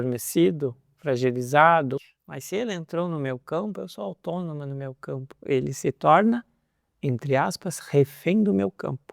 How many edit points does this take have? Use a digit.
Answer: 1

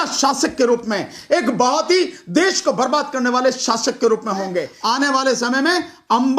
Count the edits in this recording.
1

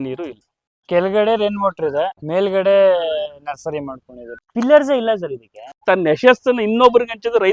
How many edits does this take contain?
4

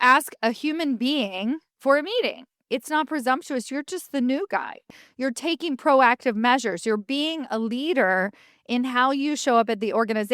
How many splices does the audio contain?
3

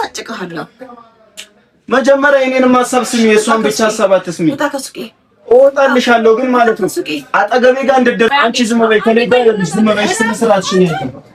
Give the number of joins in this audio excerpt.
1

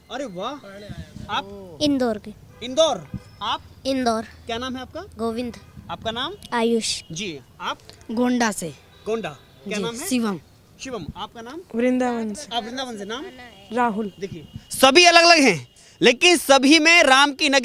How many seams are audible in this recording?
0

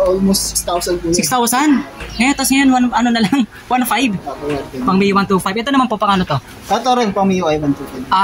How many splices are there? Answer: 0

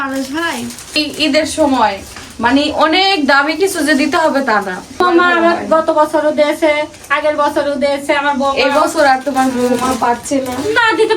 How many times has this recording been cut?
2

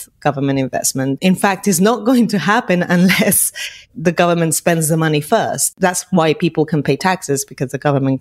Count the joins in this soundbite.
2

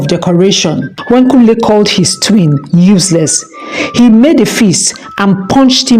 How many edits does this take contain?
1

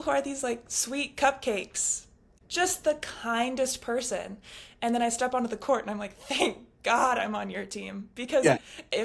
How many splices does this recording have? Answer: 1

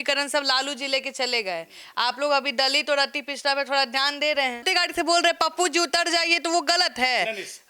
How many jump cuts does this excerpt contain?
1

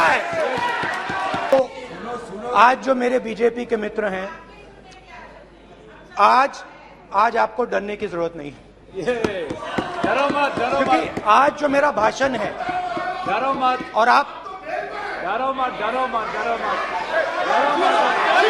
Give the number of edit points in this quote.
1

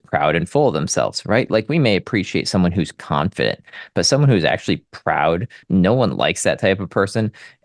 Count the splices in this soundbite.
1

